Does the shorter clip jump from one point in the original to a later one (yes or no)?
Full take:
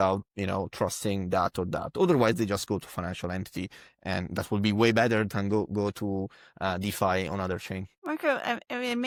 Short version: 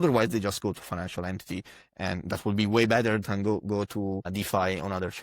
yes